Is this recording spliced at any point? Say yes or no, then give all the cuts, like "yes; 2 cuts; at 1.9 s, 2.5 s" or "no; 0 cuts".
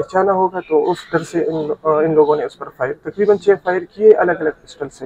no; 0 cuts